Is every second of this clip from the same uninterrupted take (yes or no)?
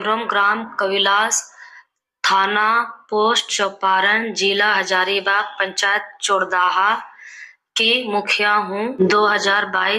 no